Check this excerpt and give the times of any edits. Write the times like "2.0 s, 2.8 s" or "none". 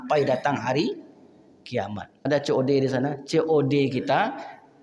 2.3 s